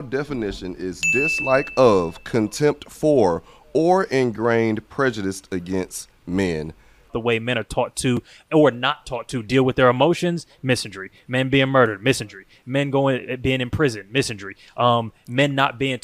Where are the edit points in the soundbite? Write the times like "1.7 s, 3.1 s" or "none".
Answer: 7.1 s

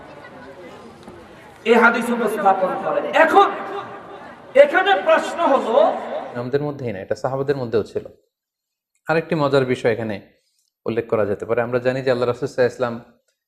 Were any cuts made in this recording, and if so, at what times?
6.4 s

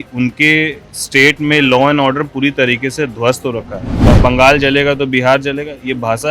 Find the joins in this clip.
4.2 s

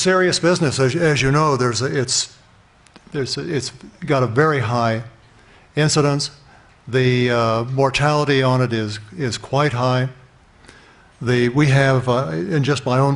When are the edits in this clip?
none

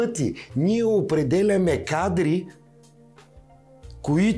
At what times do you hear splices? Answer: none

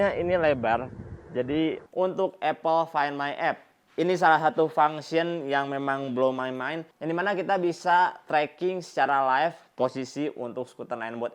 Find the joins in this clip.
1.8 s, 6.9 s

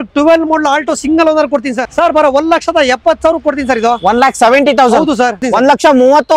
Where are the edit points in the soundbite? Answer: 1.9 s, 5.4 s

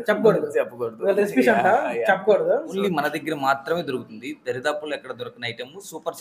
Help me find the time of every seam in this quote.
2.7 s

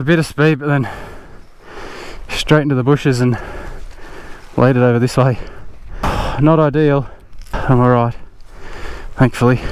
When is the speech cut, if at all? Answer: 6.1 s, 7.6 s

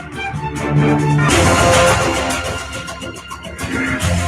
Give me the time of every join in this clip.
1.0 s

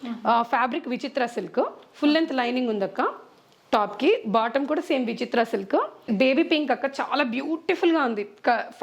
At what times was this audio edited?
6.1 s

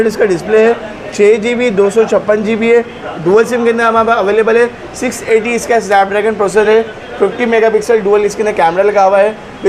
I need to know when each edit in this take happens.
none

